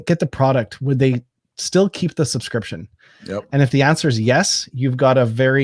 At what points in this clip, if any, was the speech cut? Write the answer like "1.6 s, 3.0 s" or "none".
none